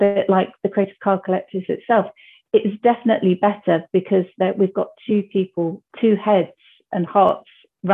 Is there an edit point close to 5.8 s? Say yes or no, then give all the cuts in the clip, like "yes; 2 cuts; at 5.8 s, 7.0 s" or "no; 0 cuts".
yes; 1 cut; at 5.8 s